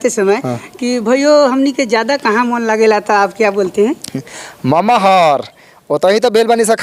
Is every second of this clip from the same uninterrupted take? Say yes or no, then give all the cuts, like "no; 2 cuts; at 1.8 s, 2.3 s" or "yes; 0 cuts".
yes; 0 cuts